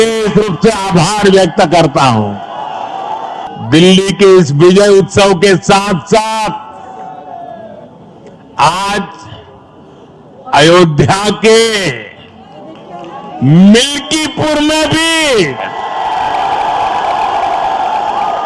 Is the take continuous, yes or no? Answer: no